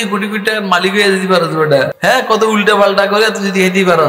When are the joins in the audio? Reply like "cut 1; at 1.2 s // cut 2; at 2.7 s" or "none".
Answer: cut 1; at 1.9 s